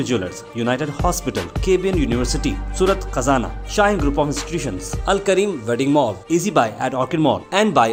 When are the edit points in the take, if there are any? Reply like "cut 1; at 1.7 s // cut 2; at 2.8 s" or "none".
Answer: none

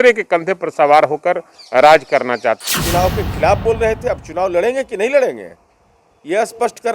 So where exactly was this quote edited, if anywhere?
cut 1; at 2.7 s

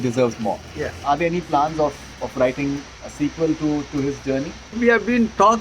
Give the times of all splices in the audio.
cut 1; at 1.0 s // cut 2; at 4.8 s

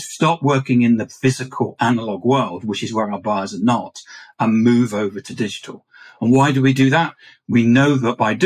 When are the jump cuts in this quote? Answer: cut 1; at 1.0 s // cut 2; at 5.2 s

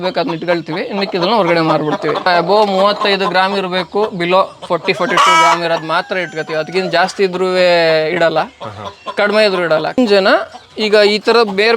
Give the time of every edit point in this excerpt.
cut 1; at 2.3 s // cut 2; at 10.0 s

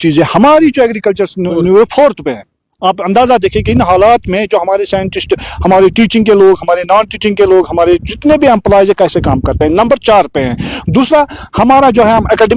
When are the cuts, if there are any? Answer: none

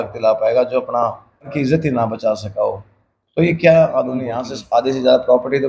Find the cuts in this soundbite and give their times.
cut 1; at 1.5 s // cut 2; at 4.5 s

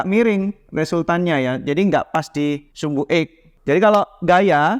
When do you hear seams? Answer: cut 1; at 3.4 s

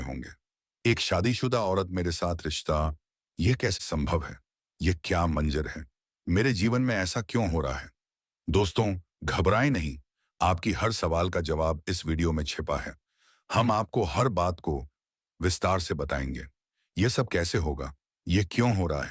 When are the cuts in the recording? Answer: cut 1; at 3.8 s

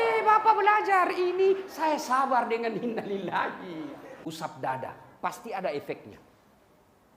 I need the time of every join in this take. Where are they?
cut 1; at 4.1 s

